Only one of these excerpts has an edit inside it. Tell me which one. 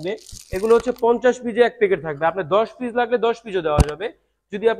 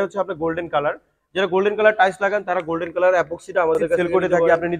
second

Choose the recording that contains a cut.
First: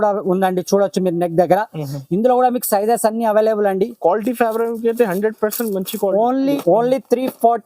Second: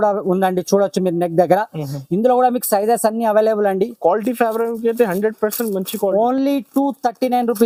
first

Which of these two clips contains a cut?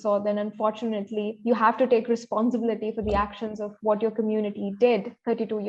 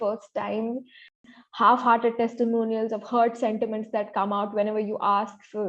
second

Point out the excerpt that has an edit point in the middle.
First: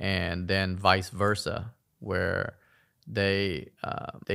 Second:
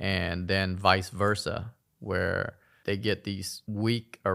second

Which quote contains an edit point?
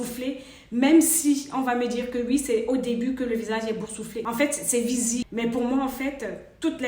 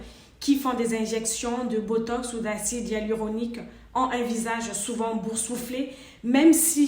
first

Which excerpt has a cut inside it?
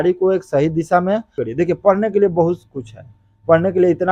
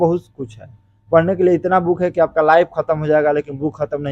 first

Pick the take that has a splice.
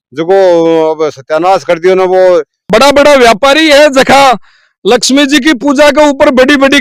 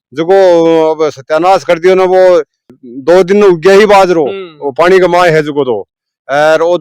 first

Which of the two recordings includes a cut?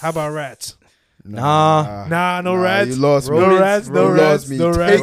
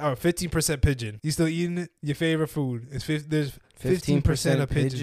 second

